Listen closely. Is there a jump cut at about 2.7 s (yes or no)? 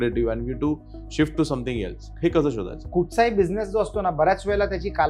yes